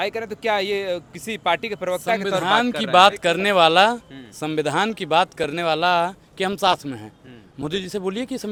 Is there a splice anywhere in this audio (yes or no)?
no